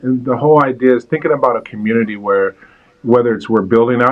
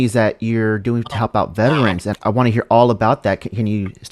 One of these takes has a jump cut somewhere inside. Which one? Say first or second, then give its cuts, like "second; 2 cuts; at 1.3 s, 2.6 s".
second; 1 cut; at 2.2 s